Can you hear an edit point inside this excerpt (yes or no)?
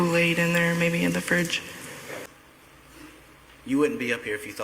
yes